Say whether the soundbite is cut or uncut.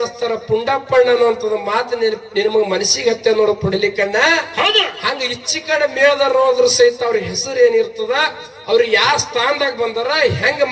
uncut